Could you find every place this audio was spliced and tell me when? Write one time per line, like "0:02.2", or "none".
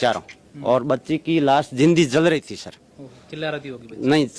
none